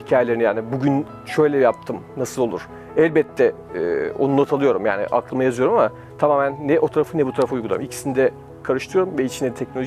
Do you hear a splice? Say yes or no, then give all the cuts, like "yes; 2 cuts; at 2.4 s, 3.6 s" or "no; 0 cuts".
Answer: no; 0 cuts